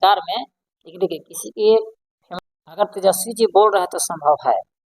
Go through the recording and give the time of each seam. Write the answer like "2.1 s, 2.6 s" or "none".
2.3 s

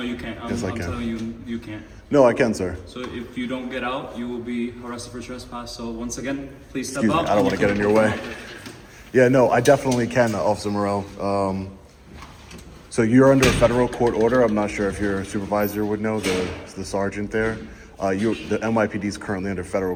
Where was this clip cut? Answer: none

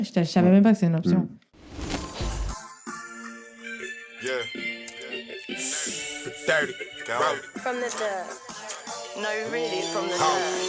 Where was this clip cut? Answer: 1.4 s

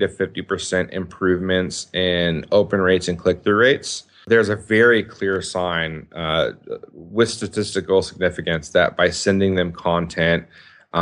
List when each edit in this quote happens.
4.2 s

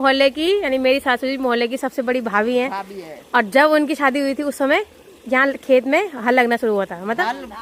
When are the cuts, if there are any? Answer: none

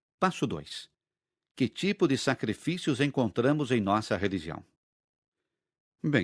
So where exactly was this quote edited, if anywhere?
3.3 s

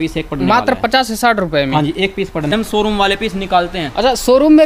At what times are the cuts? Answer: 2.5 s

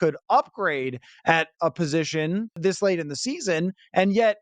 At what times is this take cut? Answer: 2.6 s

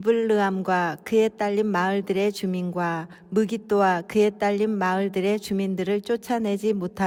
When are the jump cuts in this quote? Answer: none

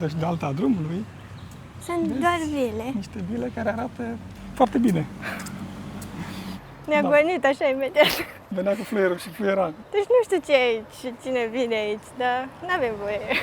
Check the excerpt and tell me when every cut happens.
4.4 s, 6.8 s

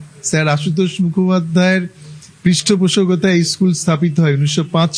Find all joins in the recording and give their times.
none

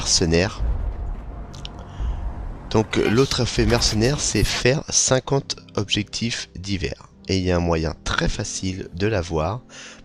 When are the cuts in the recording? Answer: none

